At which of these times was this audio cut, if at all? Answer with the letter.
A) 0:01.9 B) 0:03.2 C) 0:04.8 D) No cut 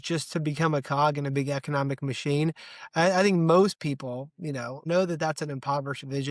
C